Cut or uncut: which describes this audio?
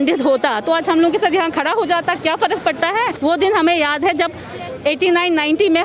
cut